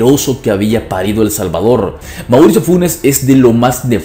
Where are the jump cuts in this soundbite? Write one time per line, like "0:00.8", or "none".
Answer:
0:02.0